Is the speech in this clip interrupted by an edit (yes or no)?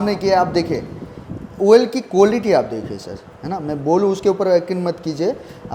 no